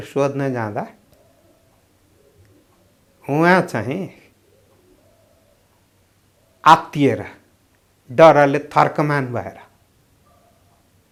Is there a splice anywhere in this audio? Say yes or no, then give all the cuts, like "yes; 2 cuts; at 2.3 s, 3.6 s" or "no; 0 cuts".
no; 0 cuts